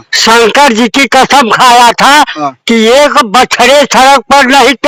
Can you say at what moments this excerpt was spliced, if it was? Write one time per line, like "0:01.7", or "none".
none